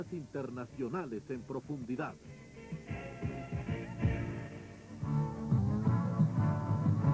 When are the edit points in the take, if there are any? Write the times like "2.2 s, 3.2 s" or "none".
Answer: none